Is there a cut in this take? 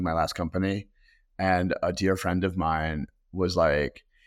no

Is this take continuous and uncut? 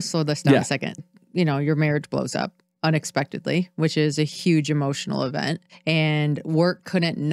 no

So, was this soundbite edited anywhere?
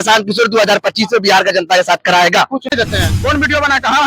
yes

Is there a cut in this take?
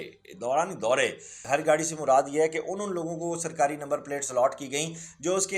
yes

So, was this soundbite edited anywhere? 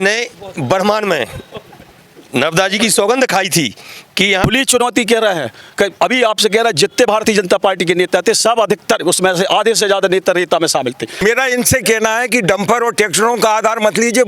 yes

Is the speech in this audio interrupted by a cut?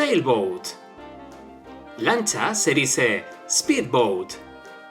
no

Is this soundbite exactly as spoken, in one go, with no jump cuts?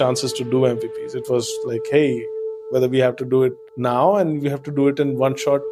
yes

